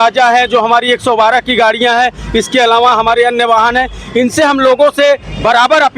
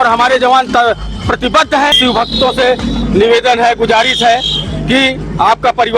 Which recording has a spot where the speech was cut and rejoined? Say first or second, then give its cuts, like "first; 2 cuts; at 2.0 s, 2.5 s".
second; 1 cut; at 1.9 s